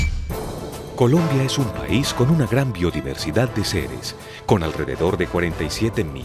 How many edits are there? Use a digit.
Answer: 1